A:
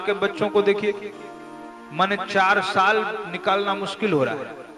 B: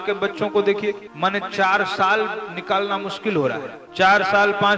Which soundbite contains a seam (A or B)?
B